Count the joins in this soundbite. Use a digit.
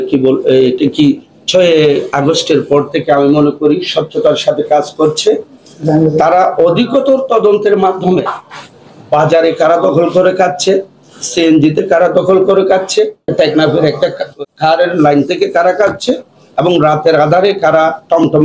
2